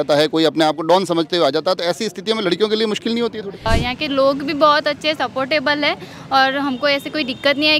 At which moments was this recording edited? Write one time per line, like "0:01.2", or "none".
0:03.7